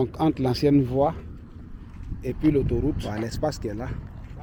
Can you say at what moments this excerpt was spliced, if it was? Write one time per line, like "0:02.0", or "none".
none